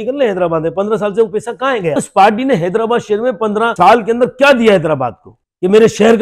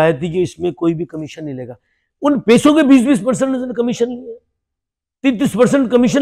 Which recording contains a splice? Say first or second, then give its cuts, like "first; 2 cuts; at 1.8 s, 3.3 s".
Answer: first; 3 cuts; at 1.9 s, 3.7 s, 5.4 s